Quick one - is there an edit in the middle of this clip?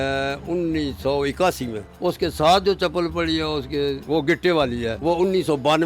yes; 3 cuts; at 1.8 s, 4.0 s, 4.9 s

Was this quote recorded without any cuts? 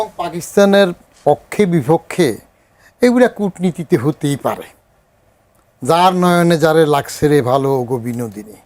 yes; 0 cuts

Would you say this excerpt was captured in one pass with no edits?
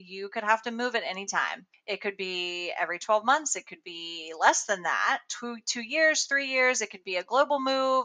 yes; 0 cuts

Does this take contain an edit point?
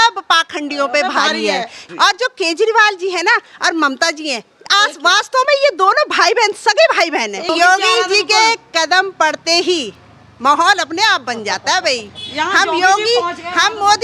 yes; 2 cuts; at 1.8 s, 7.5 s

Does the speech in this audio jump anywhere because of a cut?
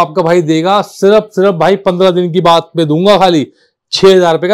no; 0 cuts

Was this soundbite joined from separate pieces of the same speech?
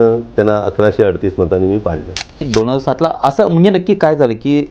yes; 1 cut; at 2.5 s

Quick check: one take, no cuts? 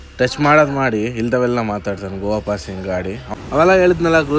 no; 1 cut; at 3.2 s

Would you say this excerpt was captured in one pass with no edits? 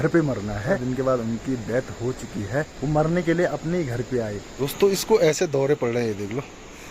no; 3 cuts; at 0.8 s, 2.7 s, 4.4 s

